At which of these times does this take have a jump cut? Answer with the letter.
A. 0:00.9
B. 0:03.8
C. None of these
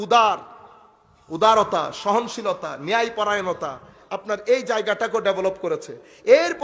C